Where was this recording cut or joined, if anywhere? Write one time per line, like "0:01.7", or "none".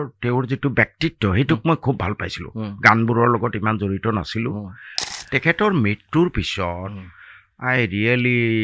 none